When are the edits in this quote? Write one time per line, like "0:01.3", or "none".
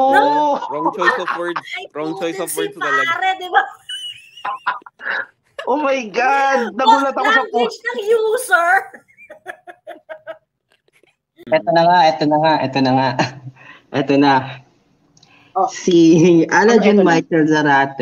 0:11.4

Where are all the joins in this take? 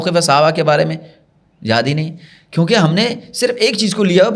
none

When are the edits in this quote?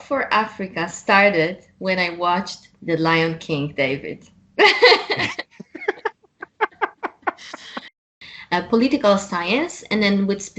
0:08.2

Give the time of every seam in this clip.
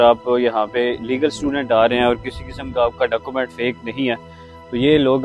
none

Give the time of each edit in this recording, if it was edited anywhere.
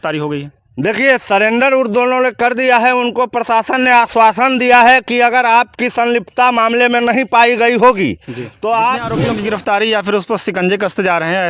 0:09.1

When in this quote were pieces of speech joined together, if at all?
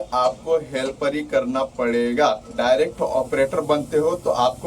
0:02.5

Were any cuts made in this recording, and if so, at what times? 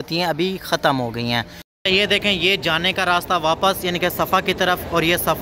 0:01.6

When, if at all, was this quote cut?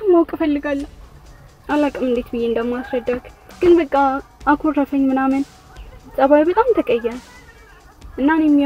0:01.0

